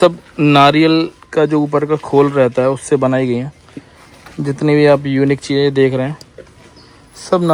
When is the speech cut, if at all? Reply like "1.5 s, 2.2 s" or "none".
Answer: none